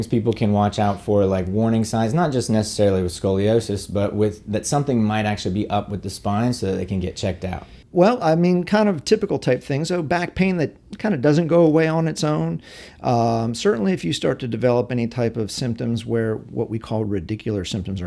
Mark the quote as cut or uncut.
uncut